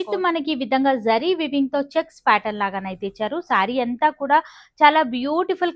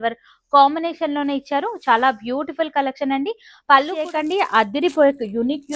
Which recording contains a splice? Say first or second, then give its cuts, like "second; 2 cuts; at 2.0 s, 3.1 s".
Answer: second; 1 cut; at 4.1 s